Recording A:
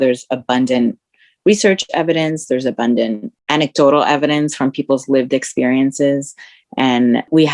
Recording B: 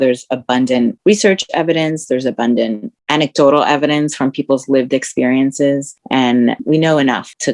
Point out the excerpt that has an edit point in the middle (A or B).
B